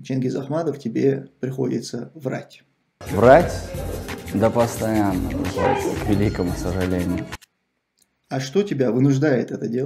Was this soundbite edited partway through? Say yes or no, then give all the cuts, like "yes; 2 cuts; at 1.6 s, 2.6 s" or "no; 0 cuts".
no; 0 cuts